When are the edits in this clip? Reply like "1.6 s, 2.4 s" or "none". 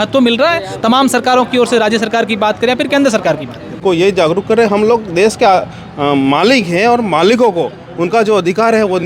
3.8 s